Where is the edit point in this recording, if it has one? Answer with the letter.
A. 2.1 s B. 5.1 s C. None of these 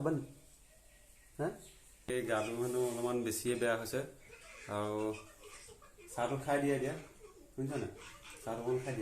A